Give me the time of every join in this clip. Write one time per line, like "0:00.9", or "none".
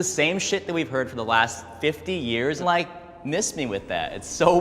0:02.6